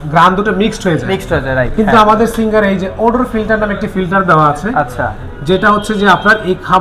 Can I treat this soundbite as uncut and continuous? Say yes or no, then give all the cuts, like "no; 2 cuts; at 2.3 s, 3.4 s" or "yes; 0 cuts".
yes; 0 cuts